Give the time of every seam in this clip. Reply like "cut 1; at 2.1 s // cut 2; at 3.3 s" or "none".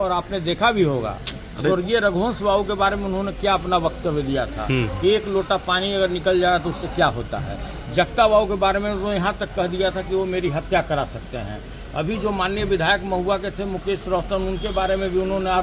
none

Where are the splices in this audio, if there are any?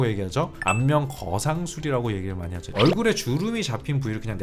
cut 1; at 2.7 s

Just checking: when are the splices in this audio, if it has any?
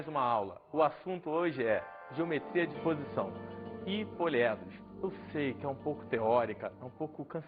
cut 1; at 1.4 s

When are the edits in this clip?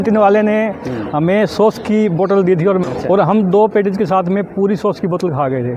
cut 1; at 2.9 s

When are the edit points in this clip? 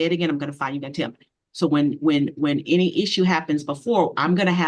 none

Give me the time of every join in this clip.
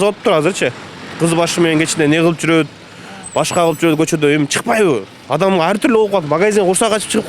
none

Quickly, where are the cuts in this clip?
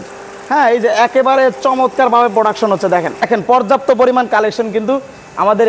cut 1; at 3.3 s

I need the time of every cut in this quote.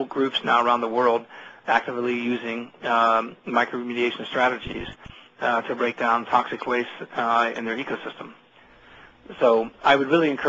none

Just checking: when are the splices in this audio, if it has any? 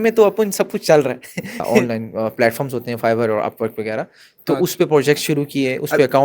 cut 1; at 1.8 s

